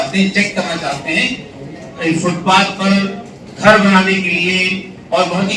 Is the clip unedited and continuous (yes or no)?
yes